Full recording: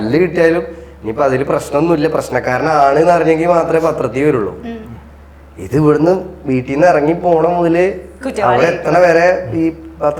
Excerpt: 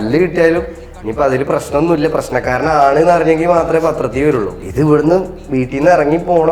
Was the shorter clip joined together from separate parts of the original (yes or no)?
yes